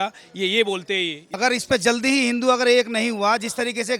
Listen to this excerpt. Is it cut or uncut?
cut